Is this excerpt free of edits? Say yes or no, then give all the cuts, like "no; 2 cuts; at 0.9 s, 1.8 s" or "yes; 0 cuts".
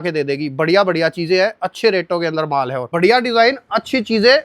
no; 1 cut; at 2.8 s